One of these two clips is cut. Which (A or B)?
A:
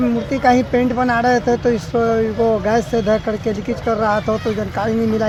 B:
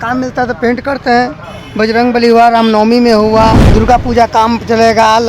B